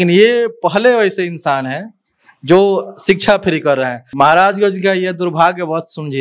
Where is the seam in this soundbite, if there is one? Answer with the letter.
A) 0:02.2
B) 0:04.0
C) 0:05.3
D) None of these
B